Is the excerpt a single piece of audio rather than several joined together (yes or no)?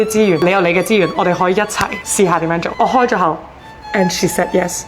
no